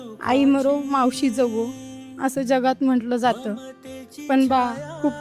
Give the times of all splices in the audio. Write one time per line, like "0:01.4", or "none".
none